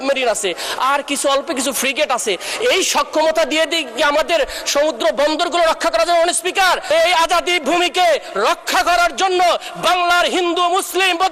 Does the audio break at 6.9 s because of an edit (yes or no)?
yes